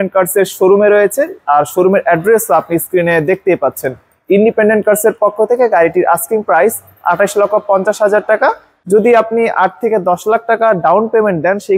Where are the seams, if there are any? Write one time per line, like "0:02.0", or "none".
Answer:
0:08.7